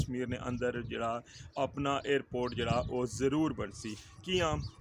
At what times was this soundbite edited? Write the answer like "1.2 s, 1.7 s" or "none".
none